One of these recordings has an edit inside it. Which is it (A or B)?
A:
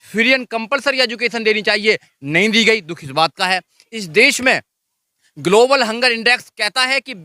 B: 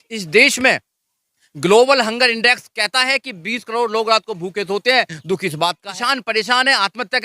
B